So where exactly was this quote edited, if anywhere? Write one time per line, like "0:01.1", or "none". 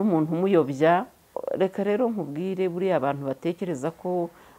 0:01.4